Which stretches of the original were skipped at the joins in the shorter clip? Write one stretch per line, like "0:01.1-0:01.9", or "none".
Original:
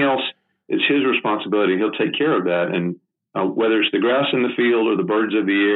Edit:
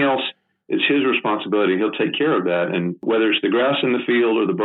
0:03.0-0:03.5